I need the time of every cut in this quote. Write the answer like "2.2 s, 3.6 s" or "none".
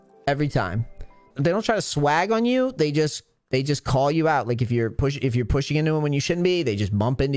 1.3 s

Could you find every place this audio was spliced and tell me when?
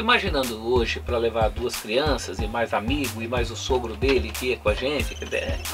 none

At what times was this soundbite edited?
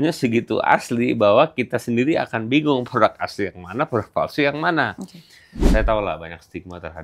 5.6 s

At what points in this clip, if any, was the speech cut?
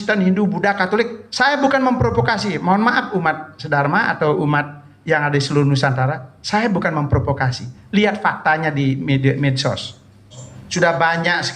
10.3 s

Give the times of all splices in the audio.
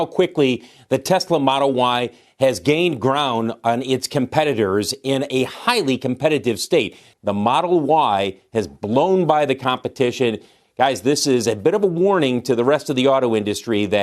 7.0 s

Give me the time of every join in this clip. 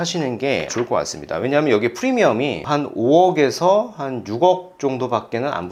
none

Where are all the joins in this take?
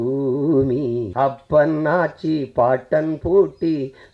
1.1 s

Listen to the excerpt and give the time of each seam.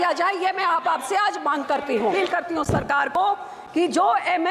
2.1 s

